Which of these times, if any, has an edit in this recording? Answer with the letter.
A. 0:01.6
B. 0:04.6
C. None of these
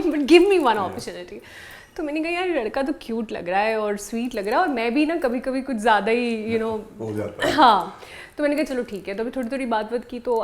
C